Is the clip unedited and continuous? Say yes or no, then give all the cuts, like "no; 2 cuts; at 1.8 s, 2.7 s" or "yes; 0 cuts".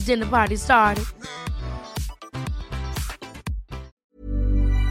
no; 1 cut; at 3.9 s